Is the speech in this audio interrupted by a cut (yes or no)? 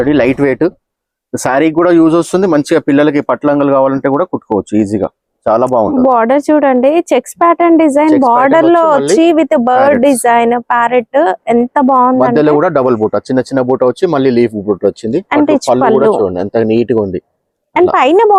no